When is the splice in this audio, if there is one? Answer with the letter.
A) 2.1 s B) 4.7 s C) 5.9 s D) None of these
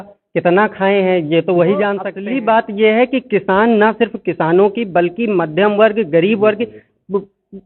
A